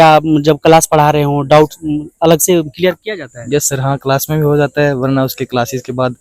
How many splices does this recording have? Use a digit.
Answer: 0